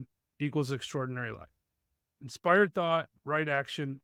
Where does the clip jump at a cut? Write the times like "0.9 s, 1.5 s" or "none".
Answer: none